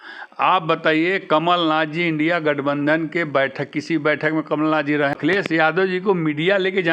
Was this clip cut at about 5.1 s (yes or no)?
yes